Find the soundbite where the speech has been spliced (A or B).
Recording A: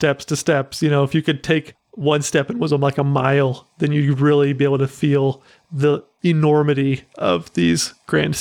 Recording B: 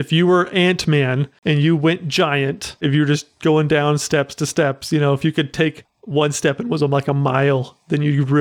B